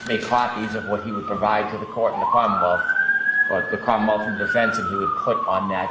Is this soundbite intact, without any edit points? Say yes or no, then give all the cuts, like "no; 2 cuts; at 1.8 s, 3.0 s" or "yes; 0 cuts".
yes; 0 cuts